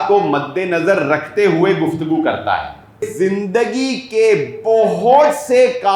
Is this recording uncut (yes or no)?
no